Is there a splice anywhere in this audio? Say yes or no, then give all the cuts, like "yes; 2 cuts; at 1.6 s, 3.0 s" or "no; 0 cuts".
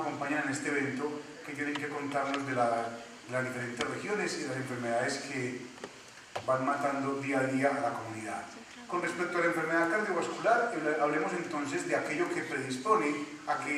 no; 0 cuts